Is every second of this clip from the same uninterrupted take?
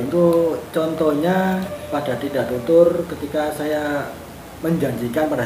no; 1 cut; at 1.8 s

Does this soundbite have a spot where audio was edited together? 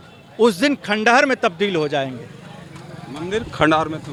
no; 0 cuts

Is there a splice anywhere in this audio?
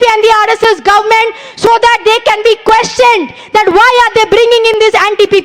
no; 0 cuts

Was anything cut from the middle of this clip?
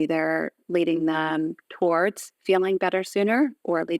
no; 0 cuts

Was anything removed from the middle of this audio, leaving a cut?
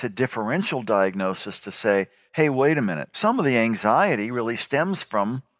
yes; 1 cut; at 3.1 s

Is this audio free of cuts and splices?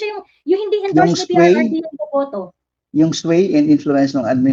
yes; 0 cuts

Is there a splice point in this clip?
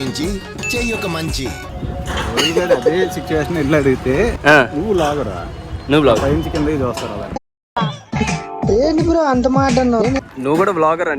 yes; 1 cut; at 1.6 s

